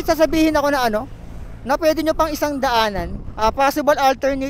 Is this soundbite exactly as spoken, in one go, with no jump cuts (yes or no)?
no